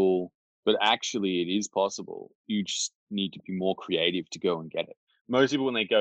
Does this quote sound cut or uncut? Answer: cut